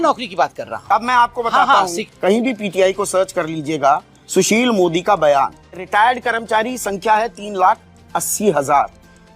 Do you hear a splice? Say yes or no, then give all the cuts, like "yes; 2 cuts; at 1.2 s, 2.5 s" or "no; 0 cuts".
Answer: yes; 2 cuts; at 2.0 s, 5.8 s